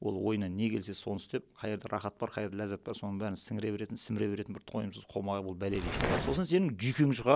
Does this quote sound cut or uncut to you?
cut